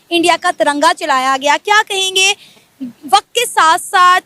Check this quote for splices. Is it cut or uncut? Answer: uncut